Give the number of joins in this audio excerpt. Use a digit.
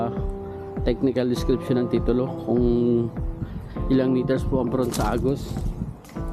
0